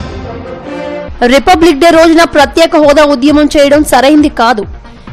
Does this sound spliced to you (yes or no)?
yes